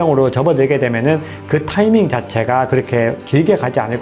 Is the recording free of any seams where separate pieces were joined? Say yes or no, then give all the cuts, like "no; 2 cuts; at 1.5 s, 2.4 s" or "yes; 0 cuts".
yes; 0 cuts